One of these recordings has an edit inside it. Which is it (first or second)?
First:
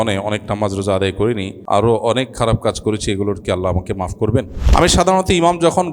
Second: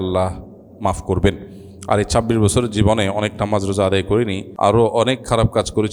first